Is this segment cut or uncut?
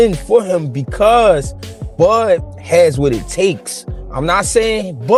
uncut